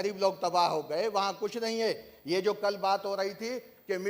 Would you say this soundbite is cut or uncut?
uncut